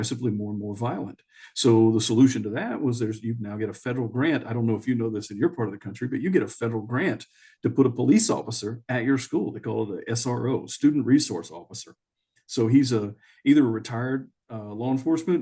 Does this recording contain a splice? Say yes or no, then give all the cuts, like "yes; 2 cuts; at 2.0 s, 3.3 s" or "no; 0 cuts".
no; 0 cuts